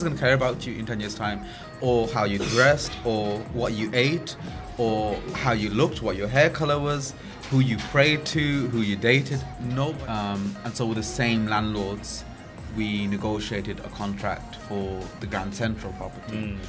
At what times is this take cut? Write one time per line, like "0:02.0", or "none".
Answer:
0:09.8